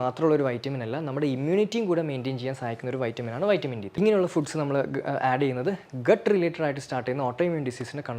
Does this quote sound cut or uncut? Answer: cut